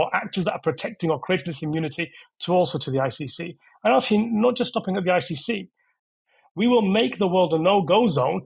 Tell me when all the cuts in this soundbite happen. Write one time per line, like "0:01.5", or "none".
0:06.1